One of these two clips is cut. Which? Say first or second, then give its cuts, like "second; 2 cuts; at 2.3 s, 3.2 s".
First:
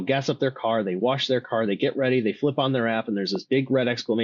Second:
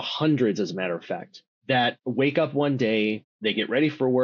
second; 2 cuts; at 1.8 s, 3.3 s